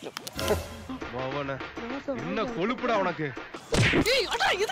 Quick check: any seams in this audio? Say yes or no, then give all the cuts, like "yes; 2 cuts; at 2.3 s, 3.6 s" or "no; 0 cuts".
no; 0 cuts